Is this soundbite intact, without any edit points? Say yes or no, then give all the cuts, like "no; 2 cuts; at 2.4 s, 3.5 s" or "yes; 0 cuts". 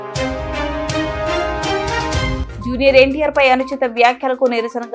yes; 0 cuts